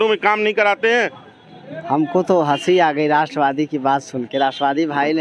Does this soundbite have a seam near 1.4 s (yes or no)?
no